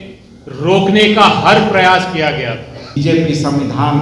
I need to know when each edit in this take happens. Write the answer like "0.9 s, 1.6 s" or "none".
3.0 s